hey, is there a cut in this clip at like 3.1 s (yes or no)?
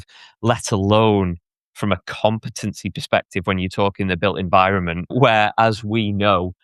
no